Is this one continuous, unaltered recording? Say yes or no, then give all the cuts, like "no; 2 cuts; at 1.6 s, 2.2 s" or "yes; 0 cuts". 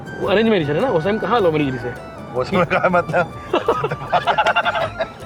yes; 0 cuts